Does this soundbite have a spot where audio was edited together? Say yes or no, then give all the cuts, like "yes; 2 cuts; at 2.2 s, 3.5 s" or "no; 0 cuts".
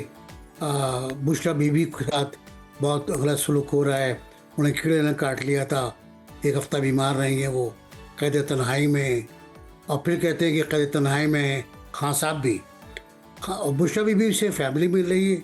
no; 0 cuts